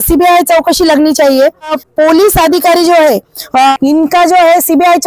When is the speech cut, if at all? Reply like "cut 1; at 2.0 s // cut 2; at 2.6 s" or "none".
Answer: cut 1; at 1.8 s // cut 2; at 3.7 s